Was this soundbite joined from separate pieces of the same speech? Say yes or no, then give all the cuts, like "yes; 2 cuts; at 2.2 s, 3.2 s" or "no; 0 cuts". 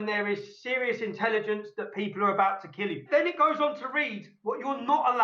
yes; 1 cut; at 3.0 s